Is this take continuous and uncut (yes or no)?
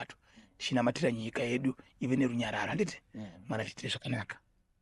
yes